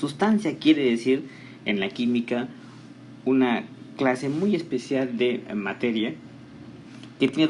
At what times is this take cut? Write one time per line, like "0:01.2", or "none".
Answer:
0:01.0